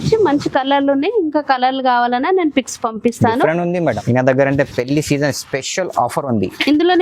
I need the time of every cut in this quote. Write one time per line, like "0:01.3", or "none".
0:03.8